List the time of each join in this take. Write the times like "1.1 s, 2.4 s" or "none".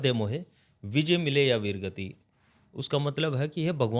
none